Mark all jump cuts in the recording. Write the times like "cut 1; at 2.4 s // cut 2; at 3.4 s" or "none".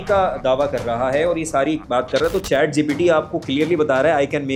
cut 1; at 1.8 s